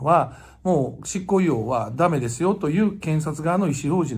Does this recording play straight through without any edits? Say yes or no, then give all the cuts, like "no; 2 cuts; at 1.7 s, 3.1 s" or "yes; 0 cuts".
yes; 0 cuts